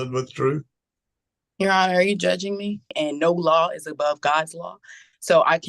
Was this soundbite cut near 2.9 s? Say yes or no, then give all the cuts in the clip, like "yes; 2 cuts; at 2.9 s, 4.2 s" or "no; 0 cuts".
yes; 1 cut; at 2.9 s